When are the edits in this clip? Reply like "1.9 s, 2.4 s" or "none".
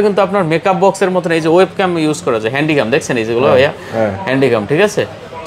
none